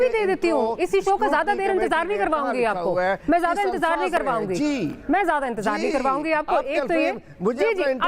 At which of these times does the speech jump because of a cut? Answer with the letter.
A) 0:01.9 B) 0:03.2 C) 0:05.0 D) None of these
D